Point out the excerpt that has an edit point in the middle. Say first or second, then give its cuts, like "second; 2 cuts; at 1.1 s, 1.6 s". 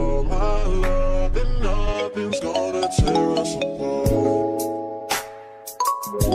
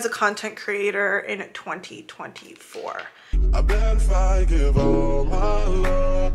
second; 1 cut; at 3.1 s